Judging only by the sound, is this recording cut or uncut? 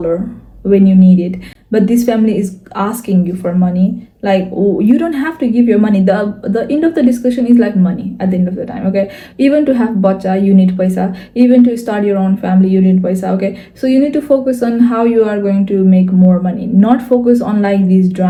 uncut